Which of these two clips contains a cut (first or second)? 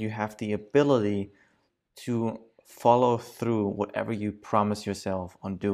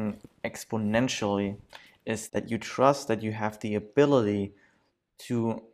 second